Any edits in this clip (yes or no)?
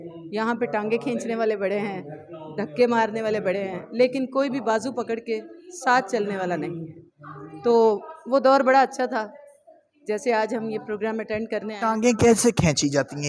no